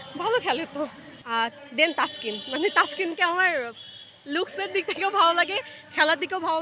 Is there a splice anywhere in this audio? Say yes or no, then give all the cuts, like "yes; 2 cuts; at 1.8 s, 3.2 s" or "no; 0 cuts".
yes; 1 cut; at 1.1 s